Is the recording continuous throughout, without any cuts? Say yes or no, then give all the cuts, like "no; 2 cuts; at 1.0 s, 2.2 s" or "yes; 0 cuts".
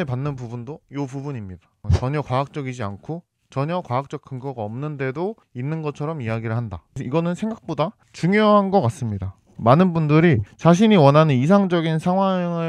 no; 1 cut; at 7.0 s